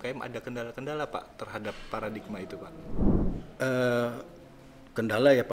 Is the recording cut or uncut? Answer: cut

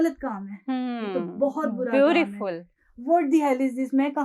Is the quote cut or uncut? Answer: uncut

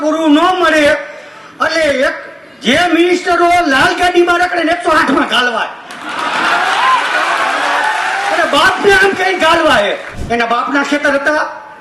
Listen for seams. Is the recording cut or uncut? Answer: cut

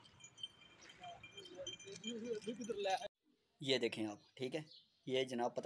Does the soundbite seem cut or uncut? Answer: cut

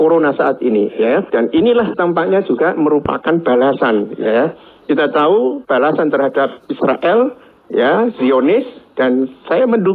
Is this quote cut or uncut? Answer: cut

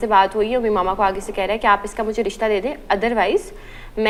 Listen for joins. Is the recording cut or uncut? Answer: uncut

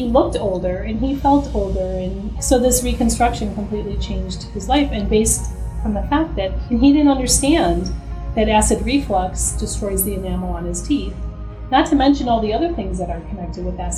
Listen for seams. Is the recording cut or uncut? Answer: uncut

